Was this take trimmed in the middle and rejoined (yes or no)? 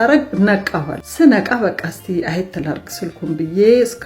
yes